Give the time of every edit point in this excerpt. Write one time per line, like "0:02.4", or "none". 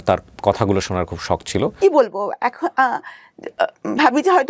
0:01.8